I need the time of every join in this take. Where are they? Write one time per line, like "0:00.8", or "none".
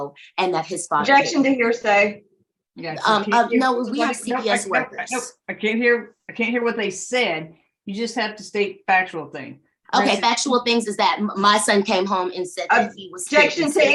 none